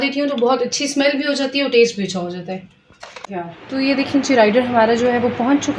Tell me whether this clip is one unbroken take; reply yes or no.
no